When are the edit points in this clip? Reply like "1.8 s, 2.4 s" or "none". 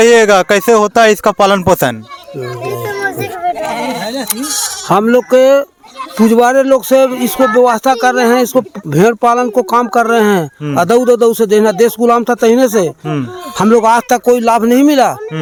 none